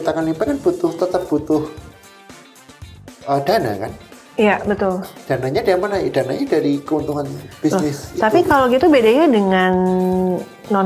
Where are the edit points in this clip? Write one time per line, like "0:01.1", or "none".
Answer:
none